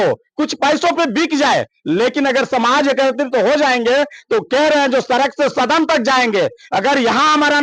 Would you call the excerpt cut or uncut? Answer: uncut